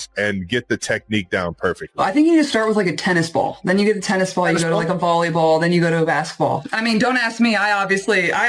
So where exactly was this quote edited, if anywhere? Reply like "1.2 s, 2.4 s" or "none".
2.0 s, 6.7 s